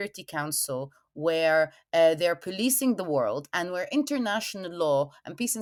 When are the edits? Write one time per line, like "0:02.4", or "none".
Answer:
none